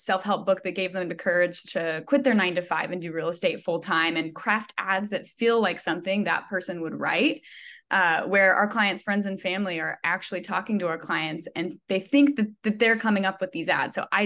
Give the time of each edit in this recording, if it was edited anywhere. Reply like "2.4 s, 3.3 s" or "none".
none